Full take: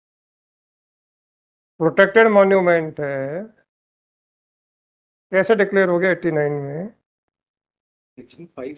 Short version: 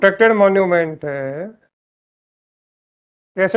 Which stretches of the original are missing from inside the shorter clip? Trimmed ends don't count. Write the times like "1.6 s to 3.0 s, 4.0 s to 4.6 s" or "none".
none